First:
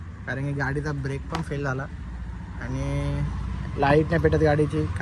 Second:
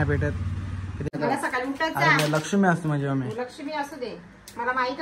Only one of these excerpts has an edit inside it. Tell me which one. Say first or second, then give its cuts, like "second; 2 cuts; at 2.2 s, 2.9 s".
second; 1 cut; at 1.1 s